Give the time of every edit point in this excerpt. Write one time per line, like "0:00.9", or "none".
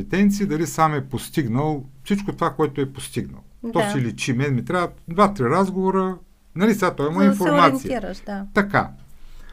none

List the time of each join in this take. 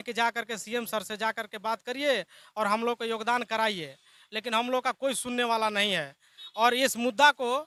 none

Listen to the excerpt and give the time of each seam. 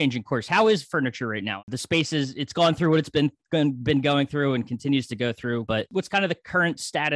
0:01.6
0:05.8

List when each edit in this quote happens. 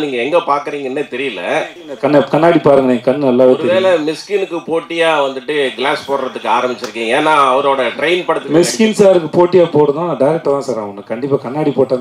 0:01.8

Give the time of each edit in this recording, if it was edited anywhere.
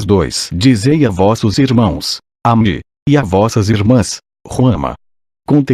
0:03.6

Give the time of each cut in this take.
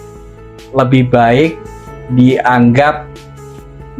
none

